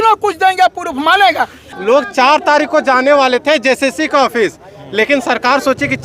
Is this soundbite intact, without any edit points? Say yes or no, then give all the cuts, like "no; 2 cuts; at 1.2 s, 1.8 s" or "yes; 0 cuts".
no; 1 cut; at 1.6 s